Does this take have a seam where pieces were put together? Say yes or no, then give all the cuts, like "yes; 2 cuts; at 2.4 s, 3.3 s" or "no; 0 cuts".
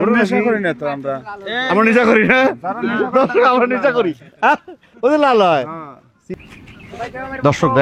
yes; 1 cut; at 6.7 s